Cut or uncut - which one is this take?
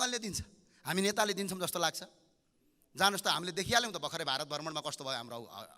uncut